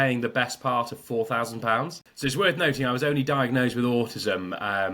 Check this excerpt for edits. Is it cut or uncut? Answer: cut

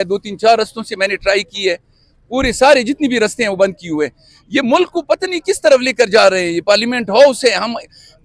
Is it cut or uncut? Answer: uncut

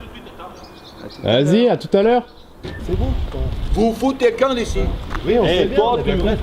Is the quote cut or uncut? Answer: cut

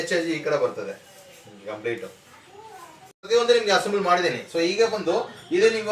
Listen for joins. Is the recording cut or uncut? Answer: cut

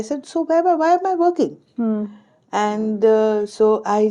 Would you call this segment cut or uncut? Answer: uncut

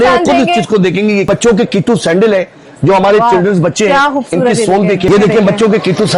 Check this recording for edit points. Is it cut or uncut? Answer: cut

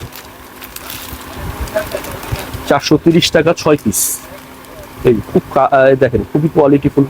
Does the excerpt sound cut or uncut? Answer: uncut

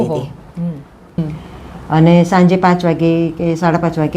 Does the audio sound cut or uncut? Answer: cut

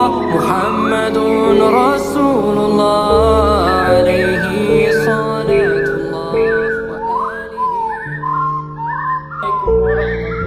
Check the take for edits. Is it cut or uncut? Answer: uncut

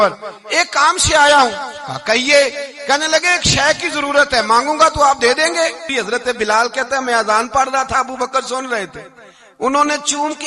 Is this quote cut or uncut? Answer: cut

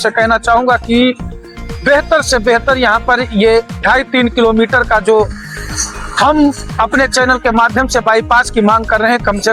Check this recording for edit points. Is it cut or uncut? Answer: uncut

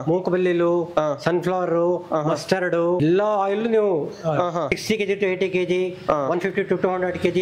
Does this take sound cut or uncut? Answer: cut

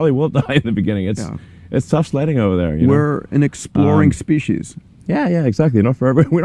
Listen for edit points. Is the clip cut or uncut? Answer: uncut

